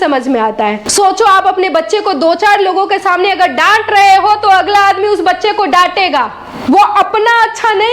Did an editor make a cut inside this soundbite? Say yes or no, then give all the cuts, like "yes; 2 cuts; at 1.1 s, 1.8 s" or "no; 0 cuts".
yes; 2 cuts; at 0.8 s, 6.5 s